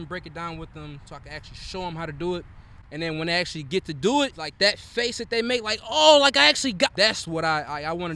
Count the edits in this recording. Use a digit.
2